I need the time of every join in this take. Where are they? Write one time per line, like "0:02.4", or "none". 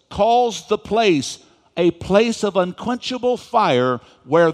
none